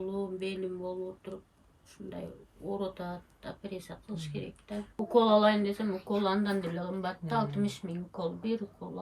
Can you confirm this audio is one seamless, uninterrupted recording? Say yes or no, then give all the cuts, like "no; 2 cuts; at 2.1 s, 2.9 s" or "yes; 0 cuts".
no; 1 cut; at 4.9 s